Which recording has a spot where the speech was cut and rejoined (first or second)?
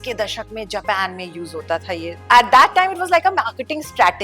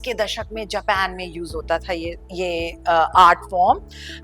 first